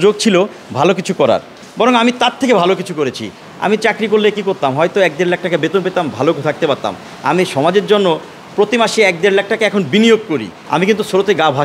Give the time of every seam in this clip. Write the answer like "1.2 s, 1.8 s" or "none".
3.3 s, 10.5 s